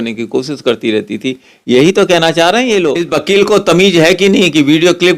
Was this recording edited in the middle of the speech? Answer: yes; 1 cut; at 3.0 s

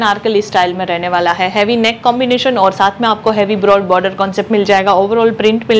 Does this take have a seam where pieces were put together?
no; 0 cuts

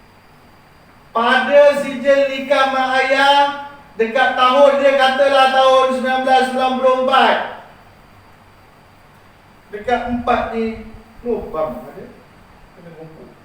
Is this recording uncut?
yes; 0 cuts

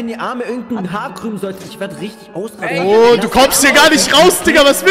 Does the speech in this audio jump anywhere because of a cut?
no; 0 cuts

